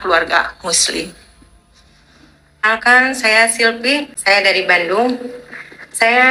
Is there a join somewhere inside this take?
yes; 2 cuts; at 2.6 s, 4.1 s

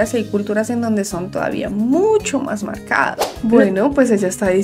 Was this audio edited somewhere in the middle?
yes; 1 cut; at 3.2 s

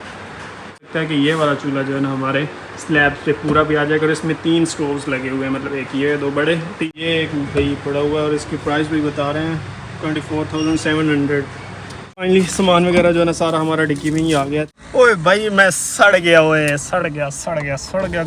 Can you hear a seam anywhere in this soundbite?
yes; 4 cuts; at 0.9 s, 6.9 s, 12.2 s, 14.7 s

